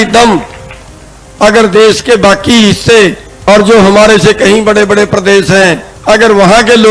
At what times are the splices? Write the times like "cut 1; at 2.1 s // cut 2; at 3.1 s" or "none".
cut 1; at 3.3 s // cut 2; at 5.9 s